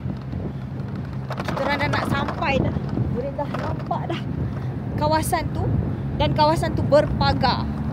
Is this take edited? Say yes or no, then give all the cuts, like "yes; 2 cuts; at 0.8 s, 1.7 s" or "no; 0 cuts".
no; 0 cuts